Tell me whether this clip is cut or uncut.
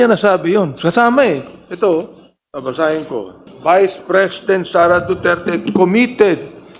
cut